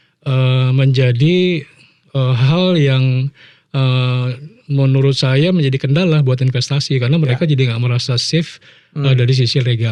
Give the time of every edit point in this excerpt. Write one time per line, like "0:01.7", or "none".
none